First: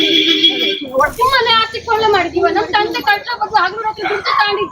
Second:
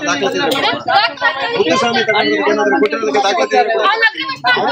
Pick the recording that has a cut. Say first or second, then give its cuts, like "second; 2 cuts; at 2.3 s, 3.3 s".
first; 1 cut; at 1.2 s